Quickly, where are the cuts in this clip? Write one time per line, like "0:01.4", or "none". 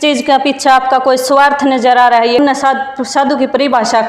0:02.4